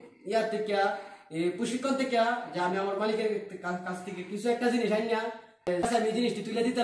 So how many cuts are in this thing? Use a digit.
1